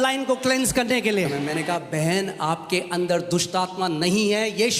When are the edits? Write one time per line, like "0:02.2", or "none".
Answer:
0:01.3

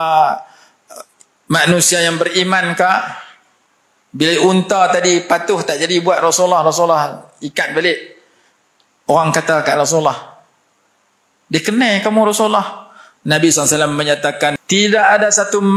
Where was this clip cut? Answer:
0:14.6

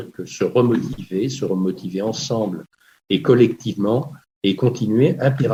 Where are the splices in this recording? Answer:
none

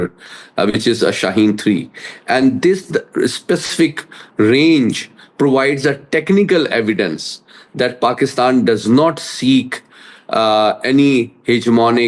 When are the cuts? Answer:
none

